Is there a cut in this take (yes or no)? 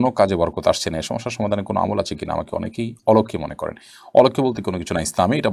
no